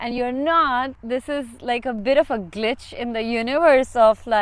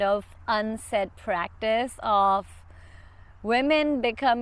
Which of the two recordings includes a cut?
first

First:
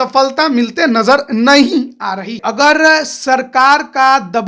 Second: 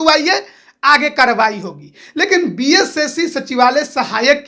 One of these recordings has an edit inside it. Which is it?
first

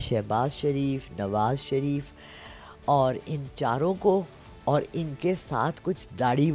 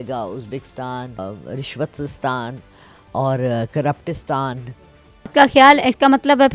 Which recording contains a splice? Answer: second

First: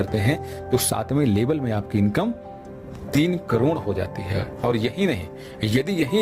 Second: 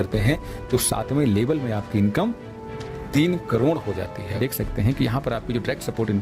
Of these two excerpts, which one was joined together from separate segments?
second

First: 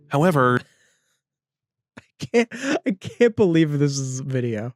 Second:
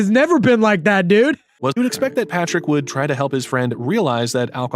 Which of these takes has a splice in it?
second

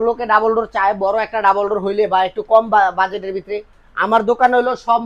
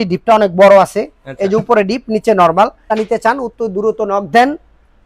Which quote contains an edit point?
second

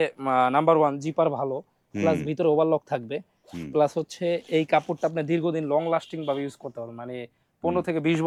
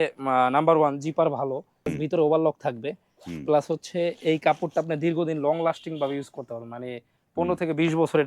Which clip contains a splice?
second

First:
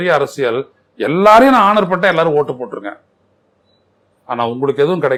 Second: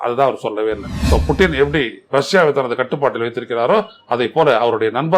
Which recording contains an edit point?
second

